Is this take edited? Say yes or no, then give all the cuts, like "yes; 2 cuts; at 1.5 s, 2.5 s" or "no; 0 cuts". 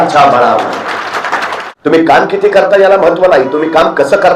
yes; 1 cut; at 1.6 s